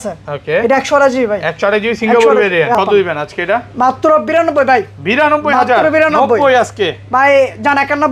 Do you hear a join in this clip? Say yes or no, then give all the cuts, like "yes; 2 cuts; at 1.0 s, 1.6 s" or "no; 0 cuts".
yes; 1 cut; at 2.7 s